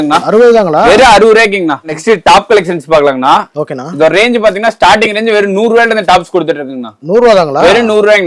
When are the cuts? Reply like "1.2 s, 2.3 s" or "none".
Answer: 2.0 s